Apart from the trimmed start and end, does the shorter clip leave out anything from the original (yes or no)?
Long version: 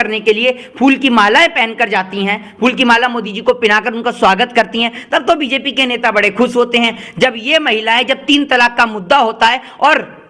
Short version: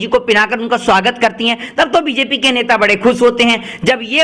no